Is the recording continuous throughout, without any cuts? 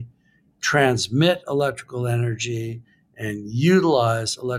yes; 0 cuts

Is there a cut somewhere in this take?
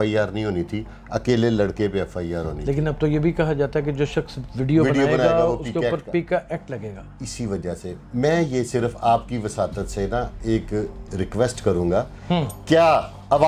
no; 0 cuts

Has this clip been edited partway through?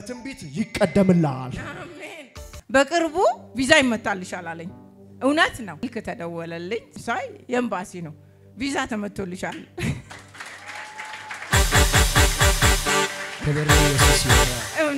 yes; 3 cuts; at 2.5 s, 5.8 s, 7.0 s

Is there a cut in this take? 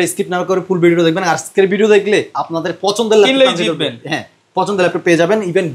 no; 0 cuts

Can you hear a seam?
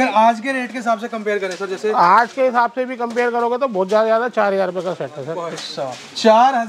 no; 0 cuts

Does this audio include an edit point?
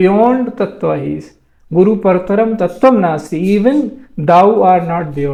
no; 0 cuts

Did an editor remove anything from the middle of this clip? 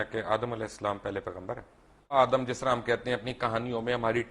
yes; 1 cut; at 2.1 s

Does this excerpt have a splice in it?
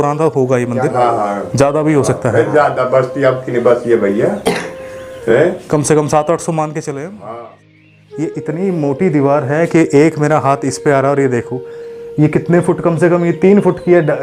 yes; 1 cut; at 7.7 s

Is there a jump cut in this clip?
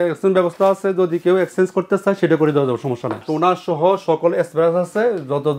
yes; 1 cut; at 3.2 s

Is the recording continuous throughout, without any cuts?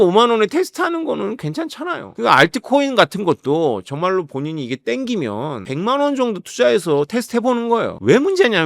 no; 2 cuts; at 2.1 s, 5.6 s

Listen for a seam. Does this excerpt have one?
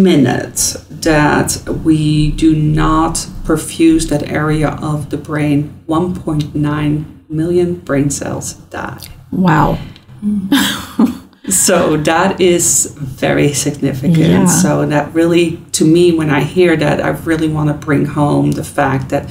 no; 0 cuts

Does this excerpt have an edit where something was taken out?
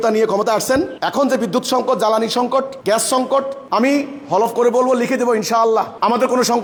no; 0 cuts

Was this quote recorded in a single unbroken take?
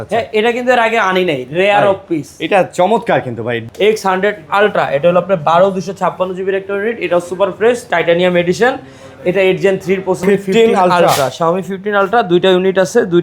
no; 2 cuts; at 3.6 s, 10.2 s

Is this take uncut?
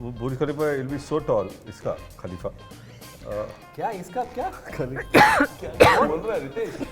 yes; 0 cuts

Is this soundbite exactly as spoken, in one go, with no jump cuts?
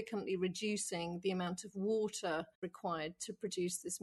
no; 1 cut; at 2.6 s

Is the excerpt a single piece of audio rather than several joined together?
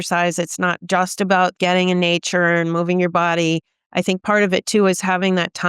no; 1 cut; at 1.5 s

